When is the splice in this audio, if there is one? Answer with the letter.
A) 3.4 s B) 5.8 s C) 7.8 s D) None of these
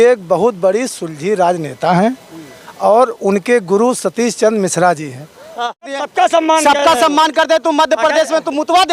B